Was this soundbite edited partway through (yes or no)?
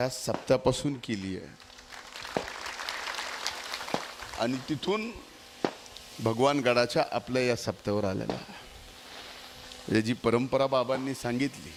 no